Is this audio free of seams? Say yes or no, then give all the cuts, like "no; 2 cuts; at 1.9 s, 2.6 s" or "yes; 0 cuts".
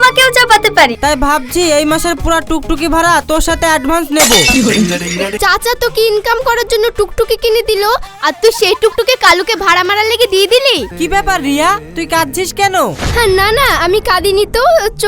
no; 3 cuts; at 1.0 s, 5.3 s, 10.9 s